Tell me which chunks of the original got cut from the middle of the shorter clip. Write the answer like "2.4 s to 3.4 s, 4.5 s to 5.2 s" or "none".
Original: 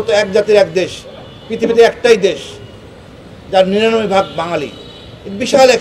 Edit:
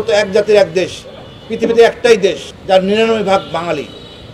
2.5 s to 3.3 s

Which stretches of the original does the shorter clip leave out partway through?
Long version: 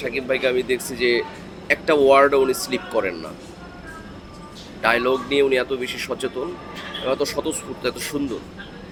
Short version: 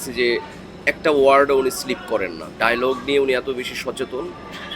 3.3 s to 4.7 s

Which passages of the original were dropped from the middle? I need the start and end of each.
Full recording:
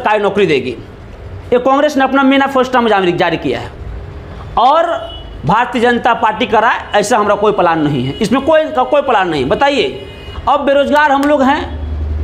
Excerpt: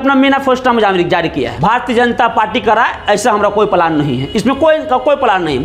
3.6 s to 5.4 s

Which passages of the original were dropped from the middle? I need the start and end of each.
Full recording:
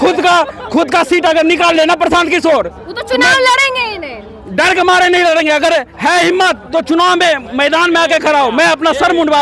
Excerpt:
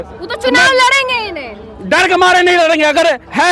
none

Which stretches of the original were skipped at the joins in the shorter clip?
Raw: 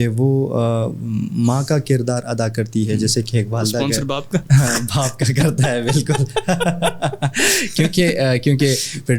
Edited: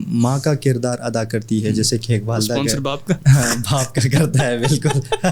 none

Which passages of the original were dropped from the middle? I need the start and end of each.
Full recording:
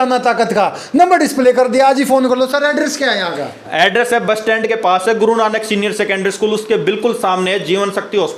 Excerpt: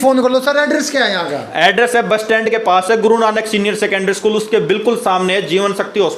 3.5 s to 3.6 s

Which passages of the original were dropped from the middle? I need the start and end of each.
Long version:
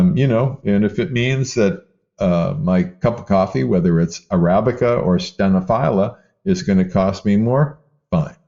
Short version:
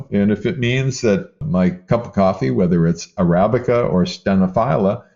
2.0 s to 2.6 s

